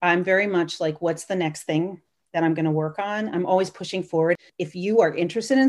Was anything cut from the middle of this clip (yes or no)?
yes